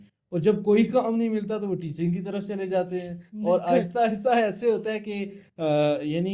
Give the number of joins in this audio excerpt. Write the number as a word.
zero